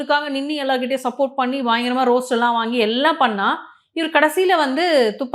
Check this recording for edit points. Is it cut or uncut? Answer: uncut